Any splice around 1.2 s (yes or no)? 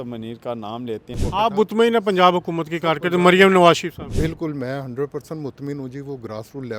yes